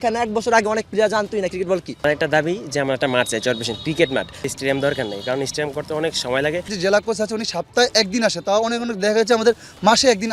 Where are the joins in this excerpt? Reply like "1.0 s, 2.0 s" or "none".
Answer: 2.0 s, 4.5 s, 6.7 s